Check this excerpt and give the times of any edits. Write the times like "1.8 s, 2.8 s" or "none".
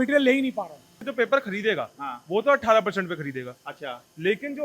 1.0 s